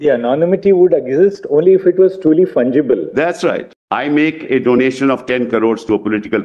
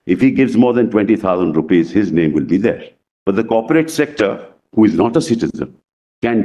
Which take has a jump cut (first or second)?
first